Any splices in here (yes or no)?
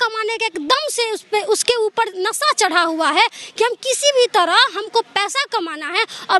no